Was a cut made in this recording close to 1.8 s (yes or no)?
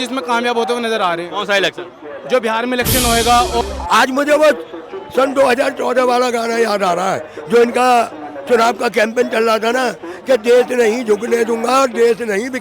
no